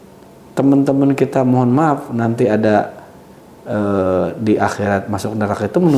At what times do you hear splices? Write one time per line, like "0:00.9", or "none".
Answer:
none